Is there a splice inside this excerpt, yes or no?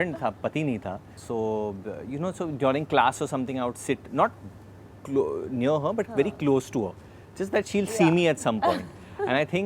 no